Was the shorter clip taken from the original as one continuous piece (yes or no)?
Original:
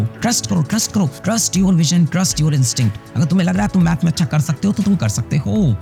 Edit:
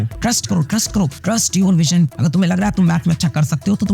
no